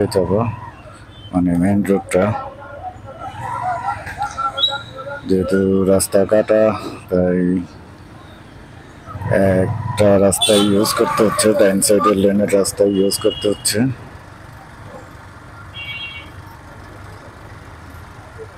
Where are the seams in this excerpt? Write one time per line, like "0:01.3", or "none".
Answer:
none